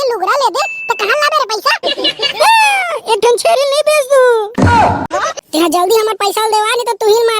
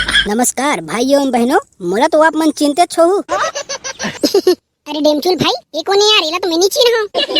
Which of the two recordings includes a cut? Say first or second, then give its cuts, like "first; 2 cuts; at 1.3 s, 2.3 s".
first; 1 cut; at 5.1 s